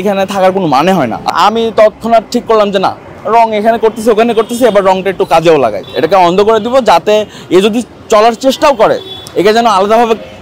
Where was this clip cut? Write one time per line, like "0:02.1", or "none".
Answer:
0:01.2
0:05.8